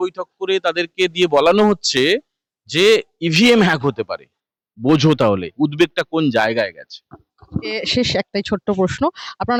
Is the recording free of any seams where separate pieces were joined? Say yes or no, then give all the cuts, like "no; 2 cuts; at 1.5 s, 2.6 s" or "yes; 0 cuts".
yes; 0 cuts